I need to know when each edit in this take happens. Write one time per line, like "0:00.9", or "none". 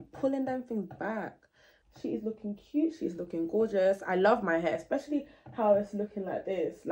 0:01.7